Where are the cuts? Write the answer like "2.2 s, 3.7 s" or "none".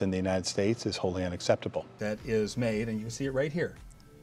1.9 s